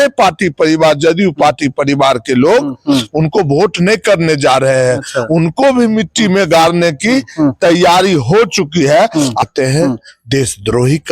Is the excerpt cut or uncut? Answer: cut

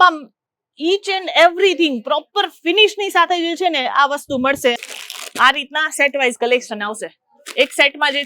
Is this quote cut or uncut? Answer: cut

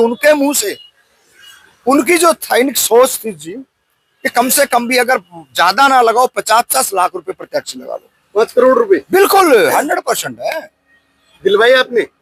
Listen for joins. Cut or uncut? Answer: uncut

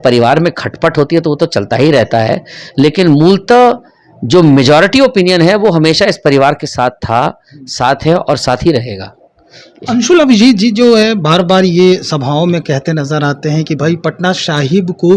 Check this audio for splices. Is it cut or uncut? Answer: uncut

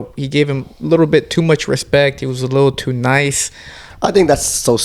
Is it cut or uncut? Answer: cut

